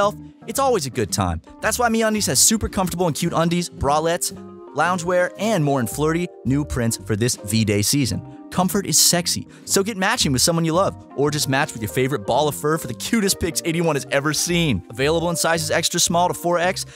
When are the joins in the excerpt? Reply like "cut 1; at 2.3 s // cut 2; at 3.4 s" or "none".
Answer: none